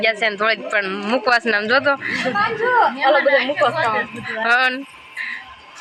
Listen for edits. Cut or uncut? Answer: uncut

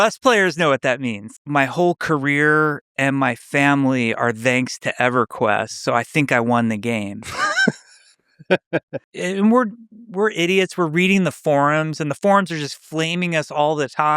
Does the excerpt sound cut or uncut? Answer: cut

